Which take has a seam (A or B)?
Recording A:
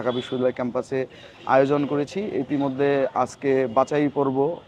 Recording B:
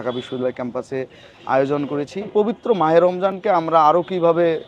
B